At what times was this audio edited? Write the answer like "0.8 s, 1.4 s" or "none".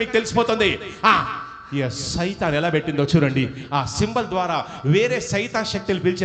none